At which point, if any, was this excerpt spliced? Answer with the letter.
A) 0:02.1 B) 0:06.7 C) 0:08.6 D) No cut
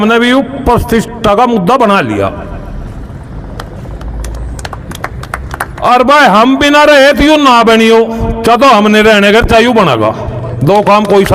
D